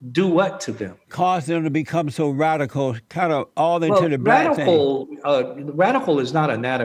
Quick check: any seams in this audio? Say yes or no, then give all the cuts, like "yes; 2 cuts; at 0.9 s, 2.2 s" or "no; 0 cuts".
no; 0 cuts